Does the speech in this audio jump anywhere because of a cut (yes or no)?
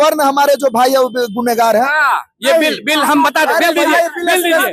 no